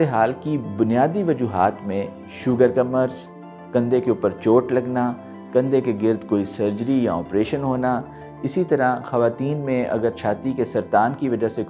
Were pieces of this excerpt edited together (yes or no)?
no